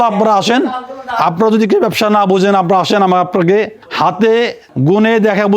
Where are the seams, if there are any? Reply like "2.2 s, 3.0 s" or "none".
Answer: 3.8 s, 4.6 s